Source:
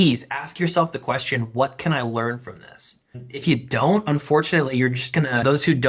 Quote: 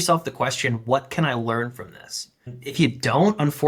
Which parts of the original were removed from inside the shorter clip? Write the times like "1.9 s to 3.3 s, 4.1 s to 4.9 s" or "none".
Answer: none